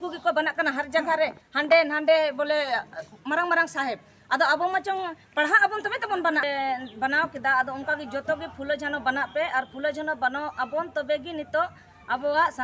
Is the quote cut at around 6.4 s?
yes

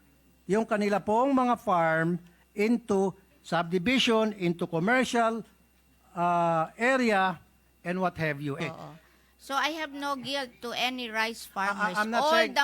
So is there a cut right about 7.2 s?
no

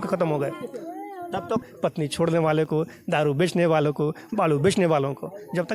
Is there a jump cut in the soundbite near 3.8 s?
no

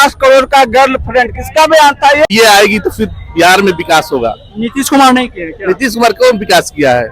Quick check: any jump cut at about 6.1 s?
no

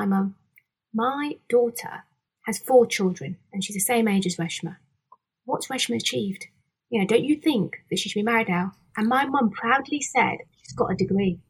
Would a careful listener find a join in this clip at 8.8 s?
no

